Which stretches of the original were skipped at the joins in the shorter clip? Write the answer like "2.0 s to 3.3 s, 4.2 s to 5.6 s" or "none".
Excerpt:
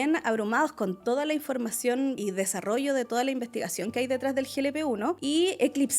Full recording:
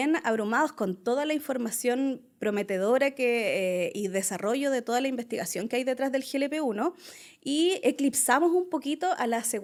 2.2 s to 4.0 s, 7.0 s to 7.4 s